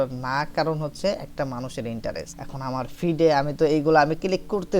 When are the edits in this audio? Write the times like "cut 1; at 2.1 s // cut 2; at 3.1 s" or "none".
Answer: cut 1; at 2.4 s